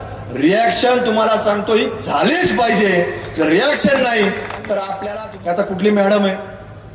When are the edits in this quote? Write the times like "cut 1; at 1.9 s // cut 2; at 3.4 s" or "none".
cut 1; at 4.9 s